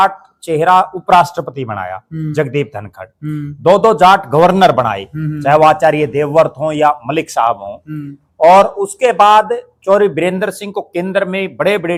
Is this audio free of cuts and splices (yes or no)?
yes